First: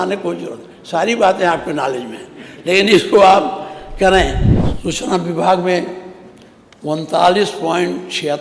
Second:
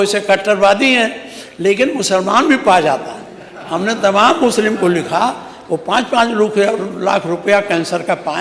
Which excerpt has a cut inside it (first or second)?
first